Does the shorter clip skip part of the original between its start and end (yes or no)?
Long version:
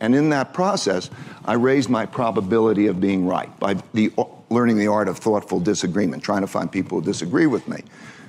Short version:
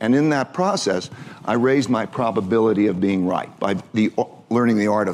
no